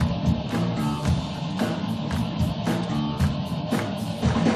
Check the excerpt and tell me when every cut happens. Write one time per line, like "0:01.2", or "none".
0:01.0